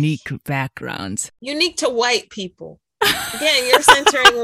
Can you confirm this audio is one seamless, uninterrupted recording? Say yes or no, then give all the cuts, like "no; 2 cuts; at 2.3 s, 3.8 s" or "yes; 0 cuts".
yes; 0 cuts